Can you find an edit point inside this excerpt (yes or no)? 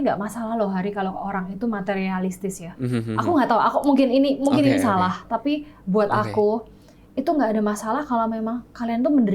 yes